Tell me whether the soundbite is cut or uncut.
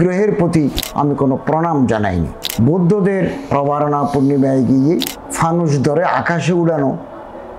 cut